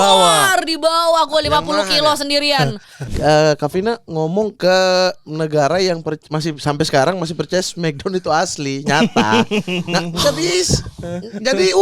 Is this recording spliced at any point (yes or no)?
yes